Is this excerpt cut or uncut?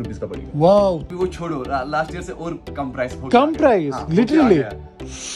cut